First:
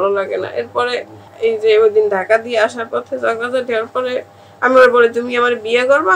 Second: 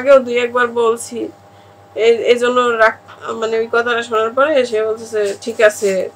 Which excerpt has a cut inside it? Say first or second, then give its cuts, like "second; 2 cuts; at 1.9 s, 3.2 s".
first; 1 cut; at 1.2 s